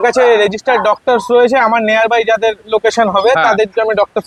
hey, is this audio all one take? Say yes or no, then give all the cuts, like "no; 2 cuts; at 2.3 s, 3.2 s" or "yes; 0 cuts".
yes; 0 cuts